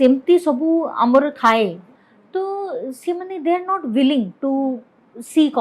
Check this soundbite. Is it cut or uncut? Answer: cut